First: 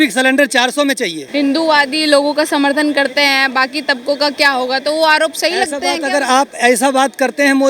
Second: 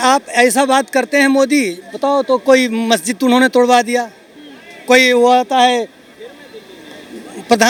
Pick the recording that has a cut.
first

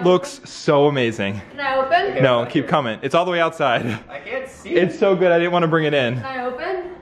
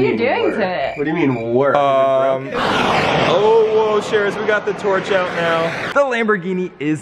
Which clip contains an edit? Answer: second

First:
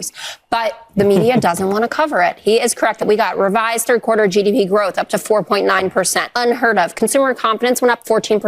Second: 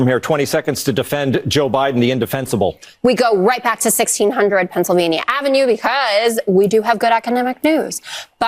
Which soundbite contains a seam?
first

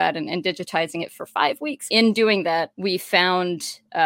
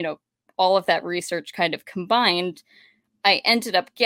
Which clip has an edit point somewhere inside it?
first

